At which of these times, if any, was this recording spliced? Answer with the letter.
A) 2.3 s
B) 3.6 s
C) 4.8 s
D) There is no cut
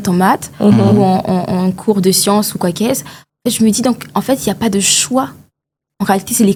D